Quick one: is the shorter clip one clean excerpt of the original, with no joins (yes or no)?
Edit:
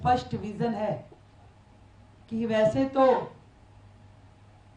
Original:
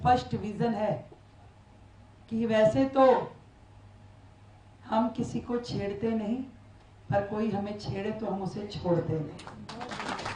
yes